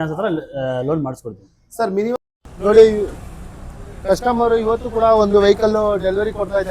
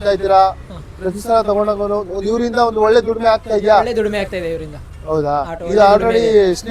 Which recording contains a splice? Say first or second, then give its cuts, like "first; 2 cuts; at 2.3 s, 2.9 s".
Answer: first; 1 cut; at 2.2 s